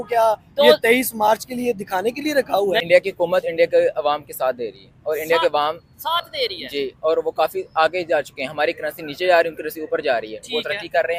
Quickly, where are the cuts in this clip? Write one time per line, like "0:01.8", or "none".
0:02.8

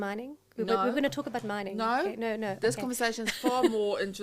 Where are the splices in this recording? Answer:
none

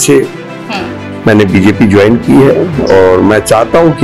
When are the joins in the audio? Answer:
none

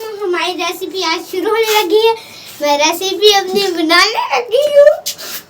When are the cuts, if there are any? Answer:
none

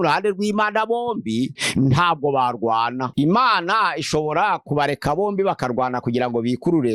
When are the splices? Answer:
0:01.6
0:03.1

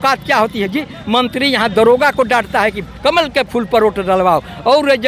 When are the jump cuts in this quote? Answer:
none

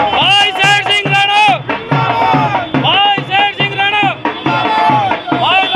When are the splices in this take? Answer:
none

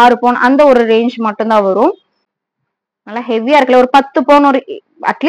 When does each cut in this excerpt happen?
none

